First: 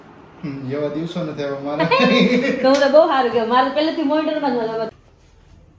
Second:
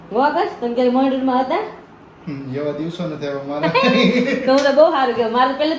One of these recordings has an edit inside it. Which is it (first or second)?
first